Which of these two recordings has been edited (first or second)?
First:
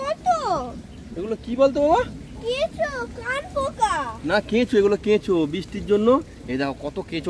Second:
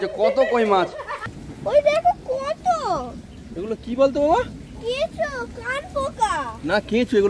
second